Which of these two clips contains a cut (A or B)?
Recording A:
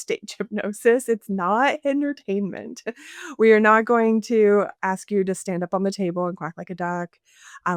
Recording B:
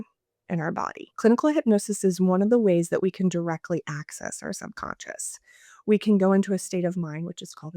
B